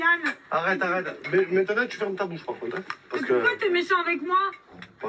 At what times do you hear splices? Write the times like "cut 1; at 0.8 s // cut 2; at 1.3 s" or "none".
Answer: none